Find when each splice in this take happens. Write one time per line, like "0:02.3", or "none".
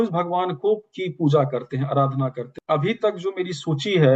0:02.6